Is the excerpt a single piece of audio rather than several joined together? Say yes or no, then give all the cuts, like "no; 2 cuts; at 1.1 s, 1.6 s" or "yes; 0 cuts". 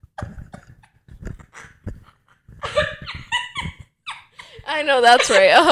yes; 0 cuts